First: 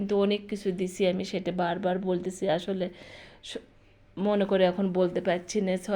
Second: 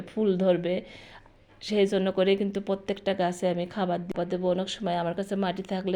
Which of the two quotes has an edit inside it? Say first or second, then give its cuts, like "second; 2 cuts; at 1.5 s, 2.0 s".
second; 1 cut; at 4.1 s